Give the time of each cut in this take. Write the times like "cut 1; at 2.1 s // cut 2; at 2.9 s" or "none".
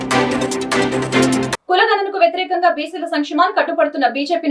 cut 1; at 1.1 s